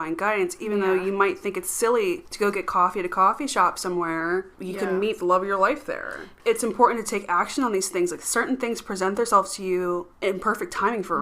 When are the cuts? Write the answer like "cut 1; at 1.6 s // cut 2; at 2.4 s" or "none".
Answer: cut 1; at 2.3 s // cut 2; at 4.6 s // cut 3; at 6.3 s // cut 4; at 10.1 s